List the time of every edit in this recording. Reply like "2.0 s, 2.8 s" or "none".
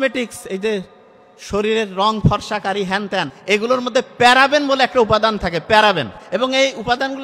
3.3 s, 6.1 s